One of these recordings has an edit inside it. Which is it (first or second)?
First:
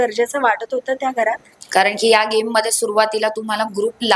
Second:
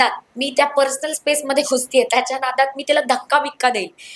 first